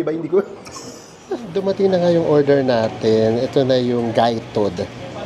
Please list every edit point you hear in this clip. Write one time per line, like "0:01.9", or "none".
0:01.5